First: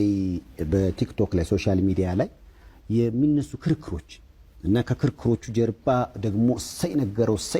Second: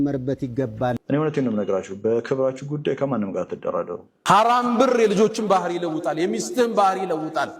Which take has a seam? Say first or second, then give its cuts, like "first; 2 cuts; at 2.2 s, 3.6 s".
second; 2 cuts; at 1.0 s, 4.1 s